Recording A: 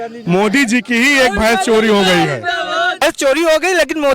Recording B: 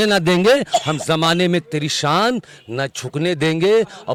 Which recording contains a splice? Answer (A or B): A